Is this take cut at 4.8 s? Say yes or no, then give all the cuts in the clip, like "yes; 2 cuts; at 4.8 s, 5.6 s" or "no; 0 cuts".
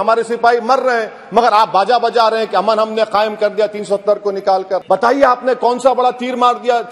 yes; 1 cut; at 4.8 s